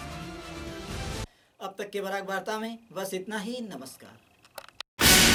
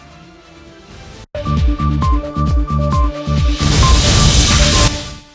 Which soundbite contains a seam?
second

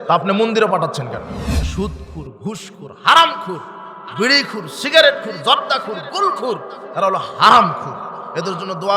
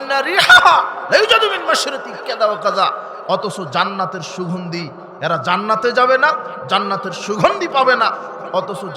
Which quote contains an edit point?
first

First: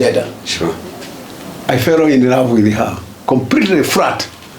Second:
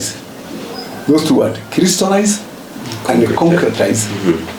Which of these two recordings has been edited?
first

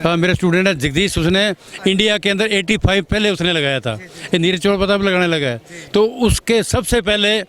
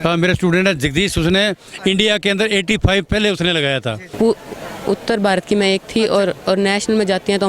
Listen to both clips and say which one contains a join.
second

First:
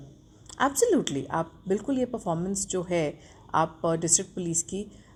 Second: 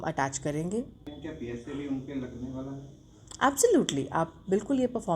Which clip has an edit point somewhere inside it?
second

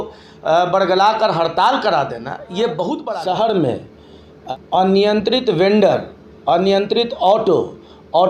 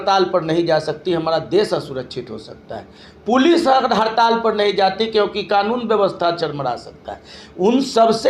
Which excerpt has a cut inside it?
first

